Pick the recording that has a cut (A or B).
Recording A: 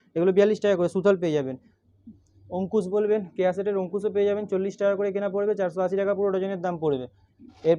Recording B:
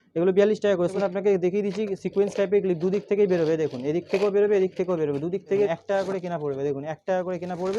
B